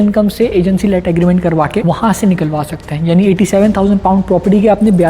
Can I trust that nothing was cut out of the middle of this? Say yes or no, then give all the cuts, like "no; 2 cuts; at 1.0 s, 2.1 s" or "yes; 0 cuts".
no; 1 cut; at 1.8 s